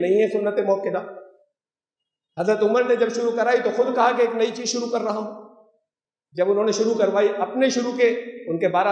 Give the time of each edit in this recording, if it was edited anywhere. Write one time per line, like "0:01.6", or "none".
none

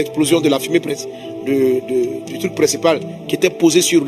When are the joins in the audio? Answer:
none

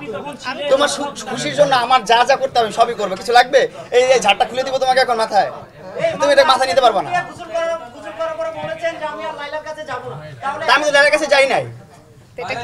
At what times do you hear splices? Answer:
none

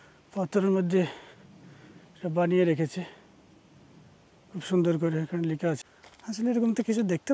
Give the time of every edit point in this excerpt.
0:05.9

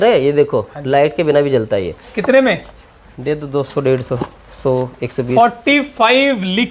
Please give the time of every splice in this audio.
none

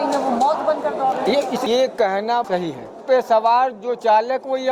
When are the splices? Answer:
0:03.0

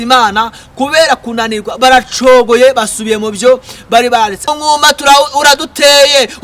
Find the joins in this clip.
0:04.4

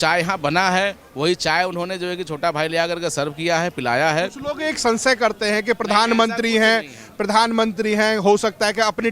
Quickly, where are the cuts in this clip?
none

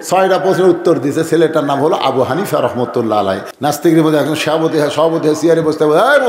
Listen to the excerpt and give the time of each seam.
0:03.5

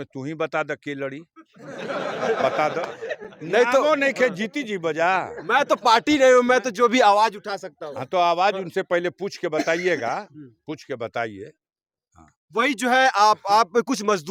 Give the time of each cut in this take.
none

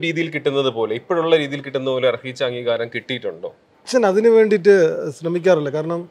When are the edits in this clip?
0:03.8

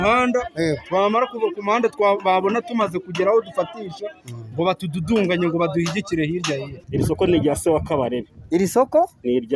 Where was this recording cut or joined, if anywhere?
0:06.8

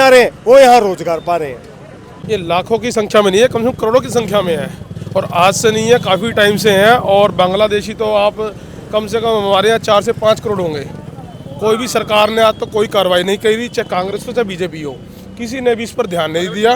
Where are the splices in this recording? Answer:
0:02.1

